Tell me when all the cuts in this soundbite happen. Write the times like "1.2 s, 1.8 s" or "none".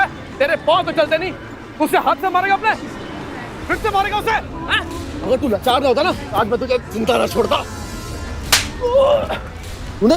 none